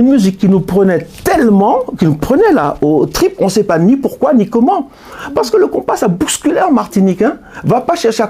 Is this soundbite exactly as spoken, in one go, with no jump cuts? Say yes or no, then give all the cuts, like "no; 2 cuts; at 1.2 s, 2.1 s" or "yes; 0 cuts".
yes; 0 cuts